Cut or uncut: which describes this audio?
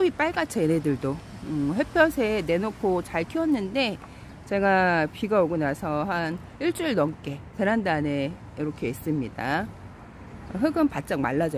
uncut